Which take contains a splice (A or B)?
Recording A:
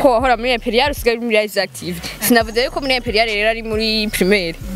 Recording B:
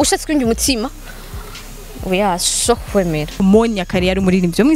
B